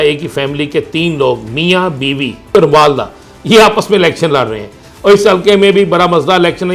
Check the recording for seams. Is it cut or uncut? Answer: uncut